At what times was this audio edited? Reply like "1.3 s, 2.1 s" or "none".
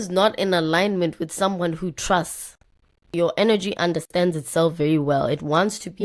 3.0 s

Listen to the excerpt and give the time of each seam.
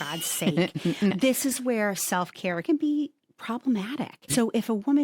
2.6 s

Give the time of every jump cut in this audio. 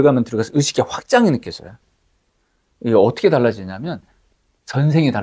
none

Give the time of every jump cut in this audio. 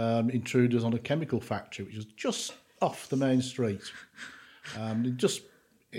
none

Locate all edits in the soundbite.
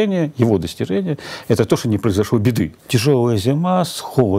2.8 s

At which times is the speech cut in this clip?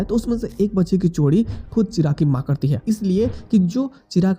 2.8 s

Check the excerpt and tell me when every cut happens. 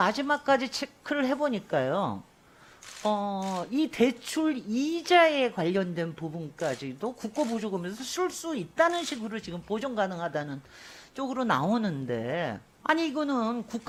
none

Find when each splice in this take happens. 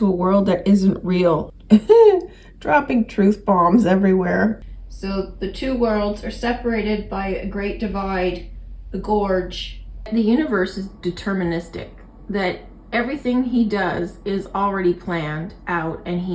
1.5 s, 4.6 s, 10.1 s

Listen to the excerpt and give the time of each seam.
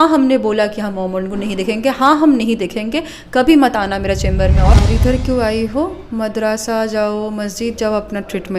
4.7 s

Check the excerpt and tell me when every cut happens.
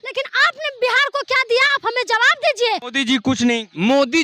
2.9 s

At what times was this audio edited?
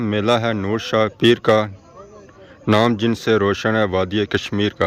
none

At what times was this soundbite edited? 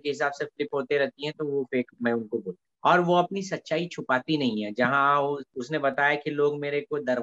2.6 s

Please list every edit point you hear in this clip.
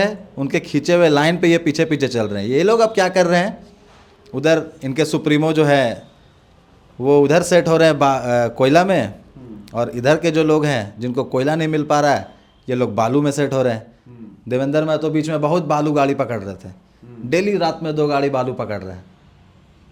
none

